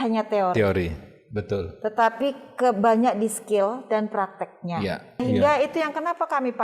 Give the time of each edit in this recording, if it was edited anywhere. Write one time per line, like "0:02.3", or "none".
0:05.2